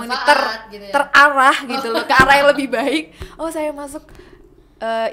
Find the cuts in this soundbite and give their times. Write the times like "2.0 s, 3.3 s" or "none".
none